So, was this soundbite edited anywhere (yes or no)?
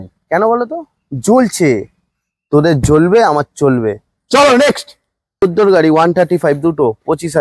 yes